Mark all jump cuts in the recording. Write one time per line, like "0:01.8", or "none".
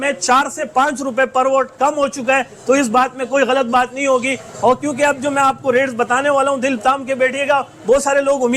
none